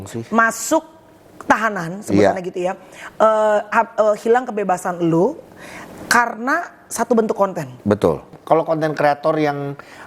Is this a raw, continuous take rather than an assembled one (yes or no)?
no